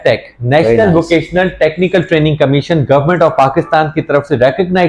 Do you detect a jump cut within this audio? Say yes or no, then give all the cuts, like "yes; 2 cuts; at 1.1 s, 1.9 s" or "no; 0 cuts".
no; 0 cuts